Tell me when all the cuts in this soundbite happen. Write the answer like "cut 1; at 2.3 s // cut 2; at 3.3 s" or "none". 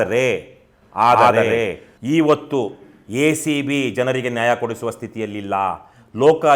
none

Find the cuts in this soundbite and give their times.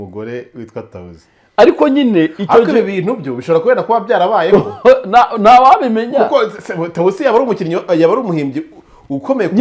none

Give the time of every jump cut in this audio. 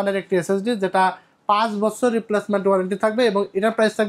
none

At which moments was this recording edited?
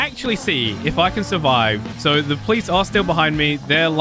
cut 1; at 1.9 s

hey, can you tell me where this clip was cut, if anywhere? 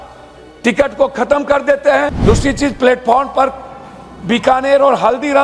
cut 1; at 2.2 s

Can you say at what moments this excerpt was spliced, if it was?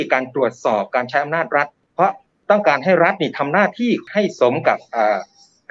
none

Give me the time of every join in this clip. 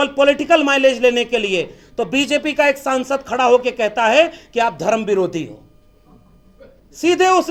none

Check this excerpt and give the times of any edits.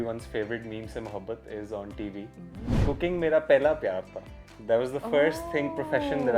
cut 1; at 2.7 s

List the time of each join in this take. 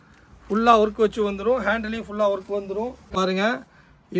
cut 1; at 3.1 s

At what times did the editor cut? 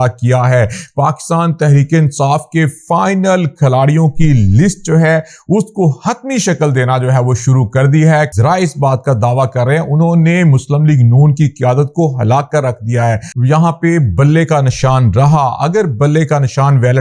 cut 1; at 8.3 s // cut 2; at 13.3 s

